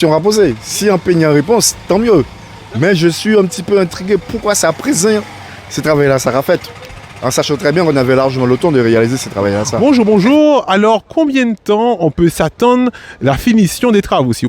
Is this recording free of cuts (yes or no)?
no